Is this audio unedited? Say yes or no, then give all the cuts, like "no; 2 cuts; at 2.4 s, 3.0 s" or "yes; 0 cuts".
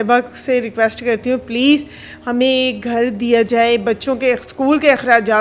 yes; 0 cuts